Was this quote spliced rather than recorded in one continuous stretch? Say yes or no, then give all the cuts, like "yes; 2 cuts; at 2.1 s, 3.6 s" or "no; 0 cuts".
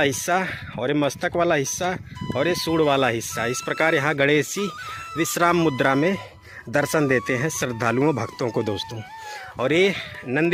no; 0 cuts